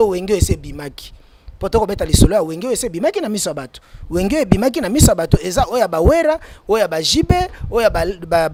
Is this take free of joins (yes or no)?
yes